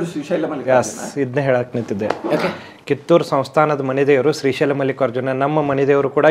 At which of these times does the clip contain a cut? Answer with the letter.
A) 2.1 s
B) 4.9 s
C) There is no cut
C